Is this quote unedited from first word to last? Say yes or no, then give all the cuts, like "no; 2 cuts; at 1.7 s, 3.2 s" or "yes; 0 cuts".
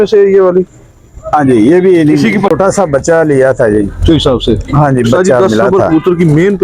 no; 2 cuts; at 2.5 s, 5.6 s